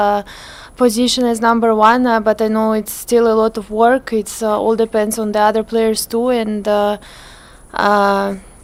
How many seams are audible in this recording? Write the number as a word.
zero